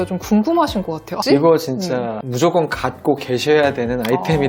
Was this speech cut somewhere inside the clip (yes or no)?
yes